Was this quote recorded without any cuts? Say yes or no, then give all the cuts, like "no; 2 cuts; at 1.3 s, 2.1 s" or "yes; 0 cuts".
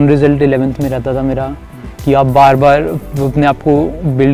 yes; 0 cuts